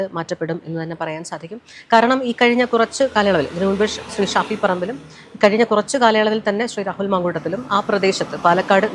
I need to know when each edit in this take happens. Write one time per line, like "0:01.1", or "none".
none